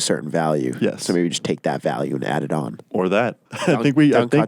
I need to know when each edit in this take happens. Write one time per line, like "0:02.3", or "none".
0:03.4